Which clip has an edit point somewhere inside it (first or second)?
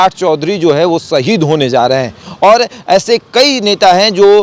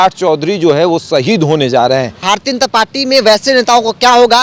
second